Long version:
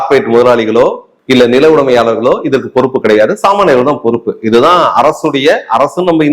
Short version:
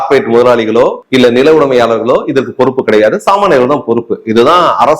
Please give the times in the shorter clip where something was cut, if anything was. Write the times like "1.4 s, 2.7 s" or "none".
1.0 s